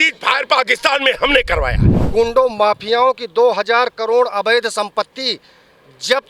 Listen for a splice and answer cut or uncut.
cut